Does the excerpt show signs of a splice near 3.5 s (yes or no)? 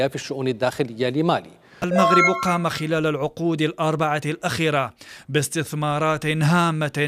no